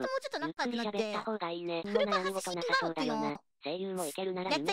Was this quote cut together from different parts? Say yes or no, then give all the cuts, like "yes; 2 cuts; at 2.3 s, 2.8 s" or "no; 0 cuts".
no; 0 cuts